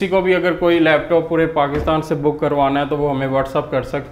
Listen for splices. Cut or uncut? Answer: uncut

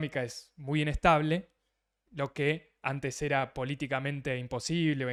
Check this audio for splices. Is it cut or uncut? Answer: uncut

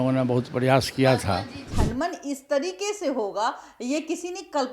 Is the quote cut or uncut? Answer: cut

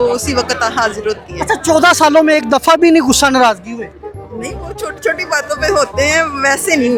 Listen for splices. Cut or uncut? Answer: uncut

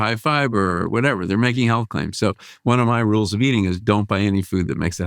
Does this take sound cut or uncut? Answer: uncut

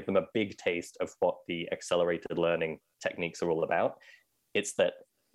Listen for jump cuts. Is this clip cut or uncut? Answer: uncut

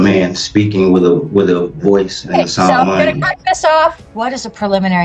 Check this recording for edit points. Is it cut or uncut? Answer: cut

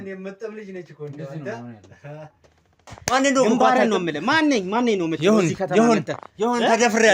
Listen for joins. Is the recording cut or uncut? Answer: cut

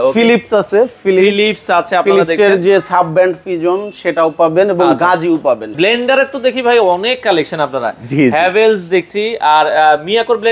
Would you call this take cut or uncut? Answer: cut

